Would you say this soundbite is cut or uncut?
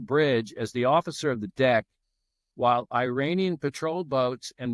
uncut